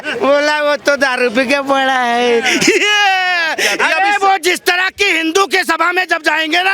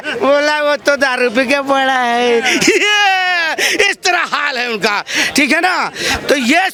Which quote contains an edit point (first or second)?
first